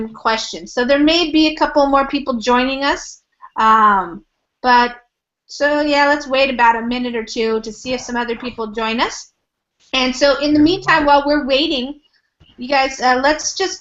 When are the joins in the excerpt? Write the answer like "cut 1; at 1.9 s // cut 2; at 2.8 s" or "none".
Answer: cut 1; at 5.7 s